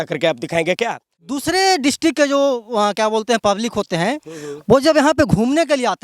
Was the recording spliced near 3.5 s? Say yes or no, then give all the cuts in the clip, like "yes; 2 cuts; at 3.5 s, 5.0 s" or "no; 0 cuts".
no; 1 cut; at 1.4 s